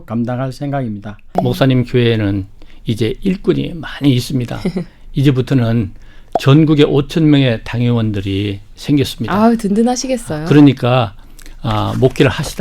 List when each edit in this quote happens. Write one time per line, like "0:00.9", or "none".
0:01.3